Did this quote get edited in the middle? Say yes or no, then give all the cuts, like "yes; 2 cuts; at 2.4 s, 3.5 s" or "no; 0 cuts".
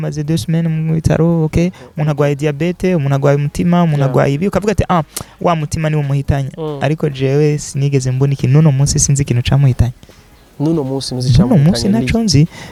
no; 0 cuts